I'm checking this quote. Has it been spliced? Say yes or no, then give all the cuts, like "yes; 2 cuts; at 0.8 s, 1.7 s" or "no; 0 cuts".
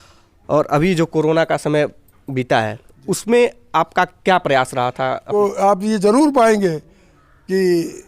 yes; 1 cut; at 5.3 s